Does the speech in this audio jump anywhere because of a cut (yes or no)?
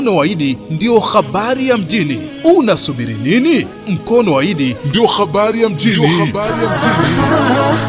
no